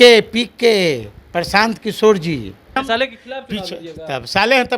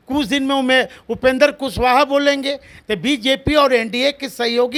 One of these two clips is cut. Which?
first; 1 cut; at 2.8 s

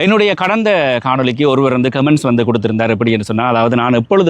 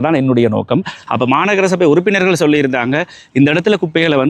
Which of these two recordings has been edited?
second; 1 cut; at 1.0 s

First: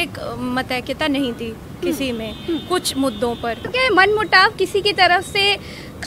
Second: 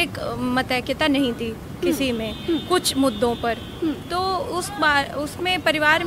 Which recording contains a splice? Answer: first; 1 cut; at 3.6 s

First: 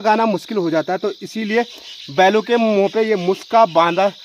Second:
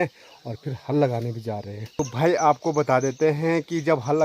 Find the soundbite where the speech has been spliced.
second; 1 cut; at 1.9 s

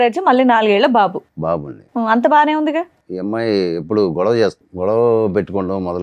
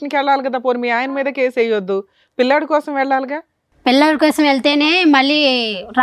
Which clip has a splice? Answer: first; 2 cuts; at 3.0 s, 4.6 s

